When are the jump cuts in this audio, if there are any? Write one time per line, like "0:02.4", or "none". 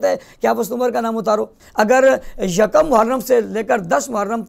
0:01.6